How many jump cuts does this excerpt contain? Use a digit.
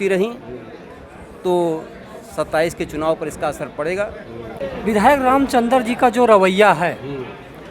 1